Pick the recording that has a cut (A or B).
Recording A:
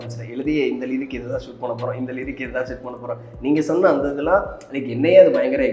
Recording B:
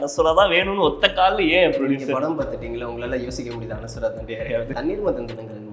B